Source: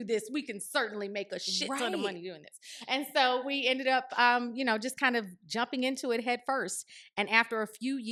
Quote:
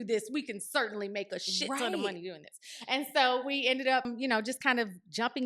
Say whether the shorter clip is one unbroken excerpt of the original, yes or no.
no